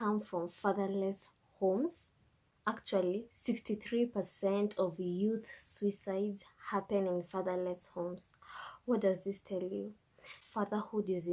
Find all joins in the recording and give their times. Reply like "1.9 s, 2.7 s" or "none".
8.5 s